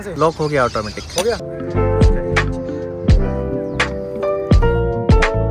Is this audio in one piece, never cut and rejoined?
yes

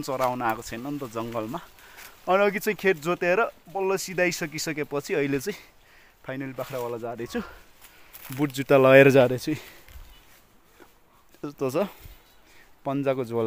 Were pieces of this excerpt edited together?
no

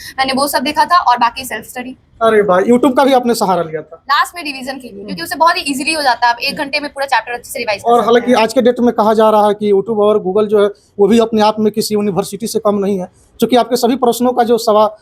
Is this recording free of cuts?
yes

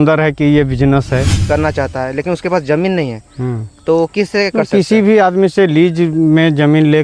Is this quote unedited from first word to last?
no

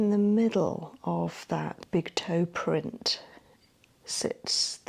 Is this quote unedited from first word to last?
no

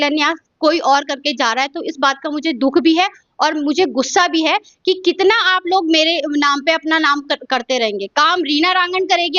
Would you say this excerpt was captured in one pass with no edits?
yes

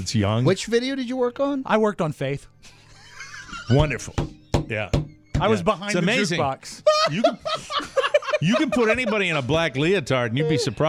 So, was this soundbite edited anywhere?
no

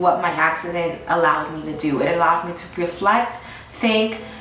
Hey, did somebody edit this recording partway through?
no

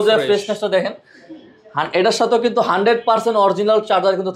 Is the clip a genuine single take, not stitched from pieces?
yes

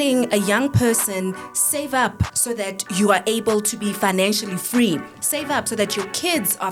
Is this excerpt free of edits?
yes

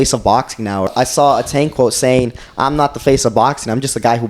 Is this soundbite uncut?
no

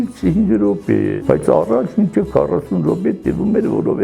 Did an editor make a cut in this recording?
yes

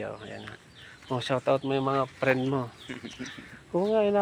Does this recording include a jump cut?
no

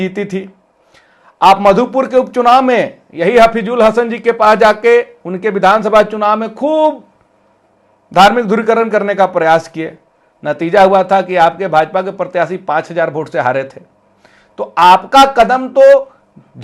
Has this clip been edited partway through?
no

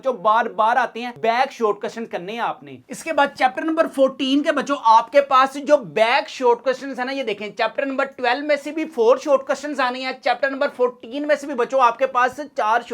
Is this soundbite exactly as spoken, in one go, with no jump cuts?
yes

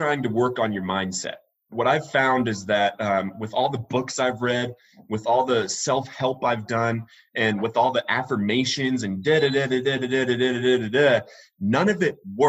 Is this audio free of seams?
no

